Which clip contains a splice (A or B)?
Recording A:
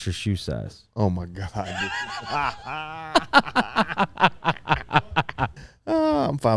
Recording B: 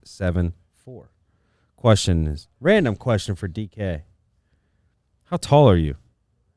A